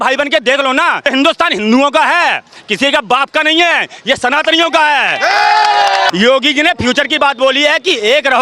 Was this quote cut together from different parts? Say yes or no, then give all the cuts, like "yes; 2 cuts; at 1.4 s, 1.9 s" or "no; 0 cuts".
yes; 2 cuts; at 1.0 s, 6.1 s